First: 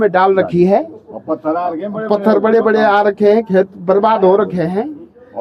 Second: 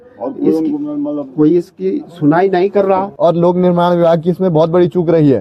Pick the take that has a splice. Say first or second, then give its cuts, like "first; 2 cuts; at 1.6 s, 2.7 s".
second; 1 cut; at 3.1 s